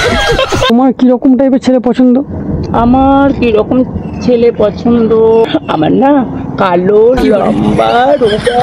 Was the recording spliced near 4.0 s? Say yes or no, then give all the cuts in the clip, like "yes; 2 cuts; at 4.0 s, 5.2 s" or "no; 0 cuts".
no; 2 cuts; at 0.7 s, 5.5 s